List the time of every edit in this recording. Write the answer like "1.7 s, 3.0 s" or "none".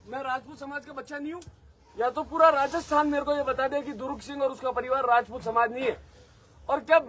none